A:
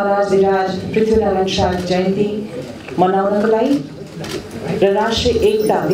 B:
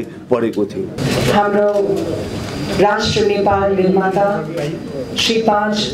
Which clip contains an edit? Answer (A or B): B